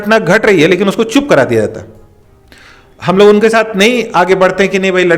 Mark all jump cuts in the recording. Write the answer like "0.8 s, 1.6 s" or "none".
none